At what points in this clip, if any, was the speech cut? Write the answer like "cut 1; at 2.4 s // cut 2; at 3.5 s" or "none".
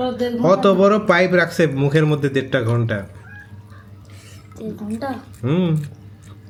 none